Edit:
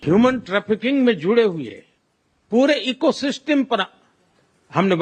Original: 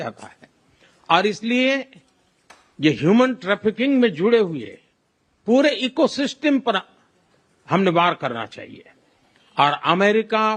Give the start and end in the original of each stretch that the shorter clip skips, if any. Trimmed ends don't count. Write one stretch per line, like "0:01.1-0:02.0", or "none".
none